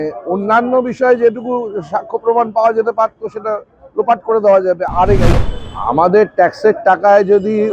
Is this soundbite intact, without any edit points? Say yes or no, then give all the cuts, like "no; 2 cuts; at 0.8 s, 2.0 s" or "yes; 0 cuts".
no; 1 cut; at 5.3 s